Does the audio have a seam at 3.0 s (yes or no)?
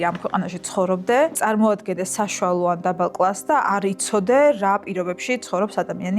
no